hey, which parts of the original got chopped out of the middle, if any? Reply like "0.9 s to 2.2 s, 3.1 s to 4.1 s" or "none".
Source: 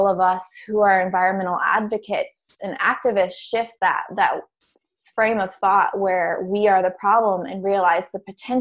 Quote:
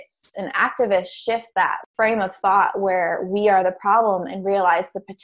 4.1 s to 5.0 s